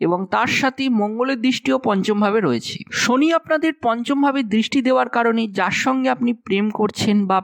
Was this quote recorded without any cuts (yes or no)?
yes